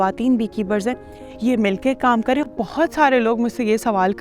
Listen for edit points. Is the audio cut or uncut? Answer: cut